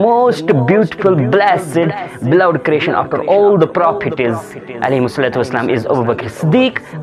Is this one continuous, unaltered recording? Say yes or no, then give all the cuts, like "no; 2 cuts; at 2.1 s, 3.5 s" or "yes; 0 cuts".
yes; 0 cuts